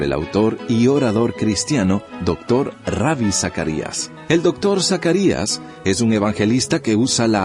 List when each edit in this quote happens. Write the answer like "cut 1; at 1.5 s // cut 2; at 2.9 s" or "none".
cut 1; at 5.2 s